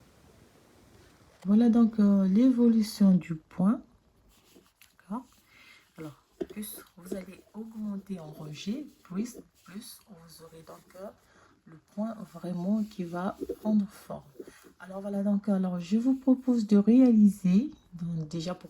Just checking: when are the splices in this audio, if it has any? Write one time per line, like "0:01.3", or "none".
0:01.3